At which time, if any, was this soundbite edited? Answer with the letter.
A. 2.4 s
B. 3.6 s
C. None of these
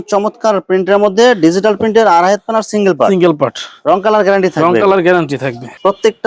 C